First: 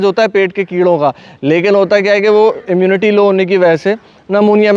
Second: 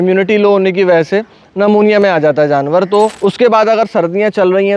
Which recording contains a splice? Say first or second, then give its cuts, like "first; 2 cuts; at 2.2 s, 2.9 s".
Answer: second; 1 cut; at 3.1 s